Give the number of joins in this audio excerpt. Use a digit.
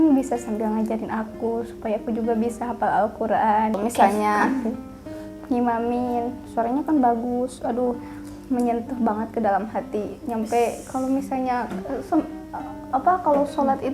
1